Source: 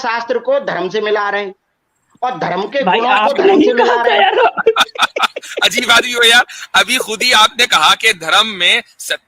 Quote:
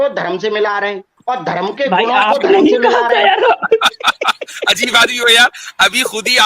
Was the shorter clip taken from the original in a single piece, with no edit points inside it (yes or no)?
no